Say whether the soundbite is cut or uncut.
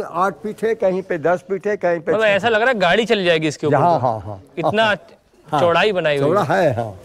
uncut